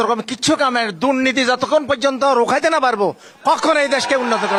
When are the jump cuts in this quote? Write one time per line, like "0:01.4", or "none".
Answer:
none